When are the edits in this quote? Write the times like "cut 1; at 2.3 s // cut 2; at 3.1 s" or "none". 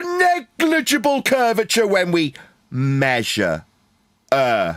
none